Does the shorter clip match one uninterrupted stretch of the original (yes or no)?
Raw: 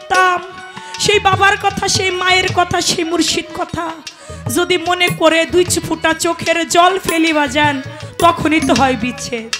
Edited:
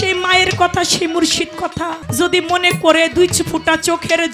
no